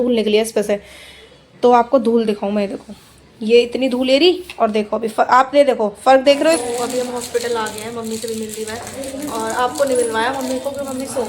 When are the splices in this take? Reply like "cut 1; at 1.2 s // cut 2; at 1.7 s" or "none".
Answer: cut 1; at 6.6 s